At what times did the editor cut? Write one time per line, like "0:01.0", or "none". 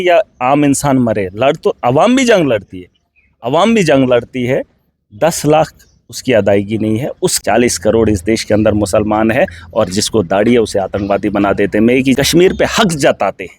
0:07.4
0:12.2

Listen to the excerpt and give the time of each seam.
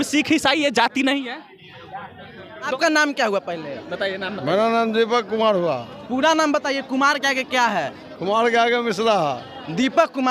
0:02.7

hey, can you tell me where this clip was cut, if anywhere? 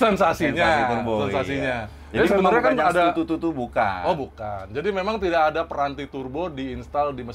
none

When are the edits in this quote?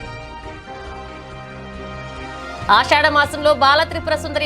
0:01.4

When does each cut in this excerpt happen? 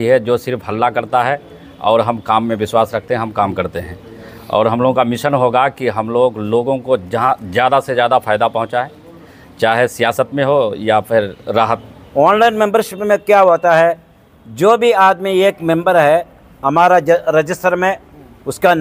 0:11.9

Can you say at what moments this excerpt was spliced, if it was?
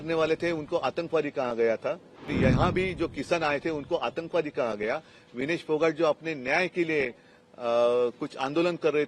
0:02.3

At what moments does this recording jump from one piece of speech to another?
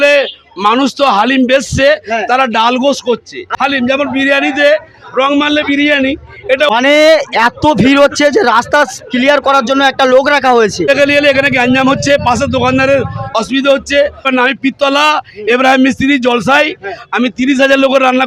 0:03.5
0:06.7
0:10.9
0:14.3

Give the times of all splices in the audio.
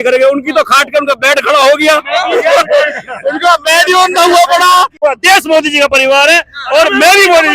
0:04.9

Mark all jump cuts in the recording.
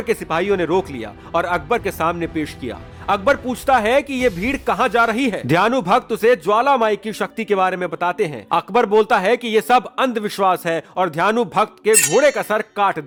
none

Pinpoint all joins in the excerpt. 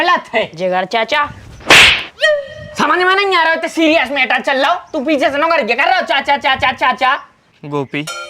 0:07.2

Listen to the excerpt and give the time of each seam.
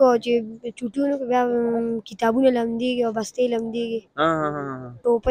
none

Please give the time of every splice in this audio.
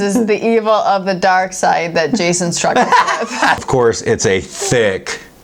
0:03.6

